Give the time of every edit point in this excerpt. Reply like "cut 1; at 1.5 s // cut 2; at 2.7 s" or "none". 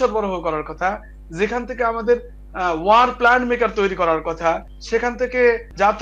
cut 1; at 4.7 s